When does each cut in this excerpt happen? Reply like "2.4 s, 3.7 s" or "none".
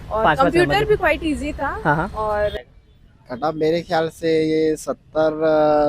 2.5 s